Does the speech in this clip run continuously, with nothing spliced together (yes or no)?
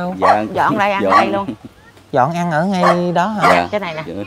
yes